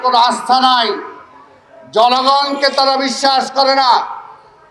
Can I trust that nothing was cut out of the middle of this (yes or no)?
yes